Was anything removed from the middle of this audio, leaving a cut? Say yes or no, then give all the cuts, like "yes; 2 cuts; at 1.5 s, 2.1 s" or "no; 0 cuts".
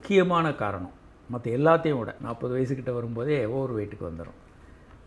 yes; 1 cut; at 2.2 s